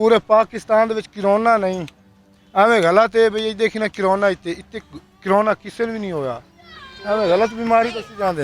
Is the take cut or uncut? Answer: uncut